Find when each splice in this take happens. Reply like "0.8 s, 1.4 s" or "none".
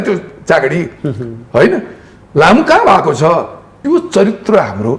3.8 s